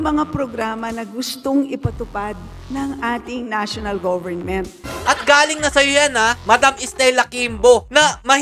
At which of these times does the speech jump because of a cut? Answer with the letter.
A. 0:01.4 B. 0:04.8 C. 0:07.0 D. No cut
B